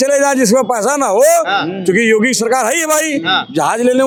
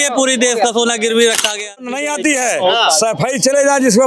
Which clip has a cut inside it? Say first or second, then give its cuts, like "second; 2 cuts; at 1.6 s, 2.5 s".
second; 1 cut; at 2.0 s